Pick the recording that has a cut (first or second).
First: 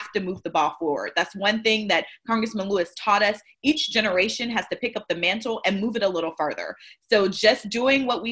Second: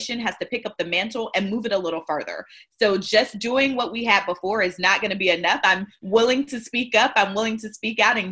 second